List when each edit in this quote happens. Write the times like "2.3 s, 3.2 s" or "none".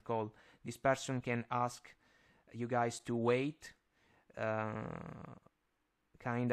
none